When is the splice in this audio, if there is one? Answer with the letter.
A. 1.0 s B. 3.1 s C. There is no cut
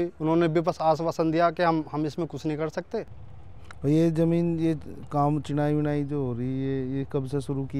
C